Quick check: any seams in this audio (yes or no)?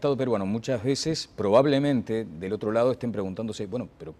no